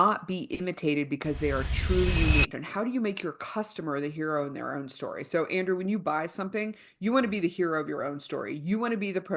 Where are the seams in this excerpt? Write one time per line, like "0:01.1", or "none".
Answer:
0:02.5